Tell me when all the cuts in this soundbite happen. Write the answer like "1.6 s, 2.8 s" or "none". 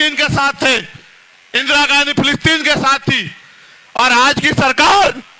none